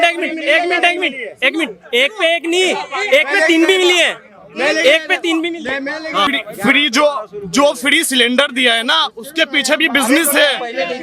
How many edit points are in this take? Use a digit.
1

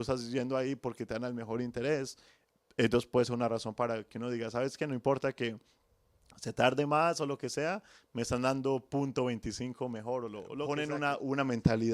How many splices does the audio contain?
1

